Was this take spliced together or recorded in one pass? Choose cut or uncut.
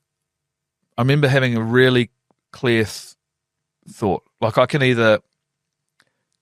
uncut